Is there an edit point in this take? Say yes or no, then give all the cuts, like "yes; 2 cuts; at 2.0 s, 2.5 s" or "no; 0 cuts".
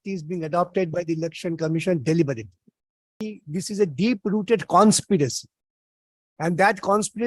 yes; 1 cut; at 3.3 s